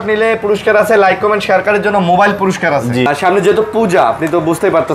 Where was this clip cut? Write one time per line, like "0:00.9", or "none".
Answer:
0:03.1